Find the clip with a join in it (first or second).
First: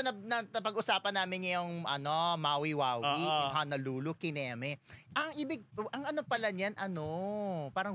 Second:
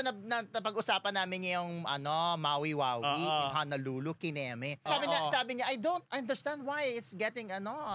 second